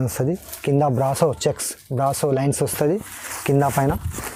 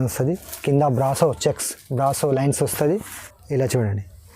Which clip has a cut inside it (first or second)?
second